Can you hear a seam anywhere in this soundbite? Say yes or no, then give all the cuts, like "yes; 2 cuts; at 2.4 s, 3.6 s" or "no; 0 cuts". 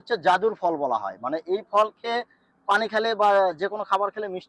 no; 0 cuts